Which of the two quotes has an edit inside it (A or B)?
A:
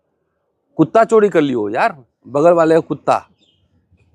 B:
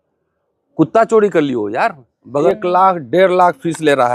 B